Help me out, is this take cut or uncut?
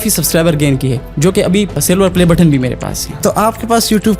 cut